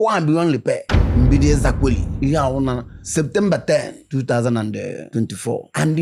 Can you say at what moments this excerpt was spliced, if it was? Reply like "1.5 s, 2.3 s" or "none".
none